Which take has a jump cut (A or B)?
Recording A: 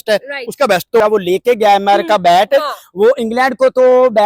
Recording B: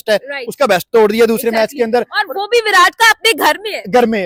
A